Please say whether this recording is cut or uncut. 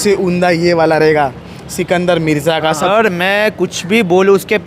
cut